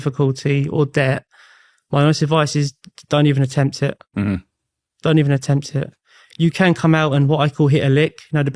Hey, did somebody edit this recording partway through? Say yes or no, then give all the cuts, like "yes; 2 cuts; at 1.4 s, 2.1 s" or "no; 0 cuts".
no; 0 cuts